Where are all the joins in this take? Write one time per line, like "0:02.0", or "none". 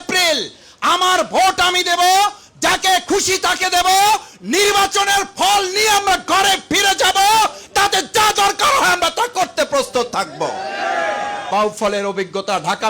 0:11.5